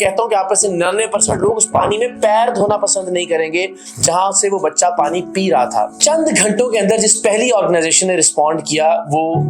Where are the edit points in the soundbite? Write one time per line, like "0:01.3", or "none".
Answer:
0:05.9